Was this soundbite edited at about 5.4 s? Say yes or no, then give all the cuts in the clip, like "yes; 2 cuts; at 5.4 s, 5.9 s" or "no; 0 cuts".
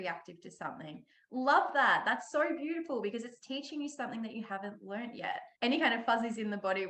yes; 1 cut; at 5.4 s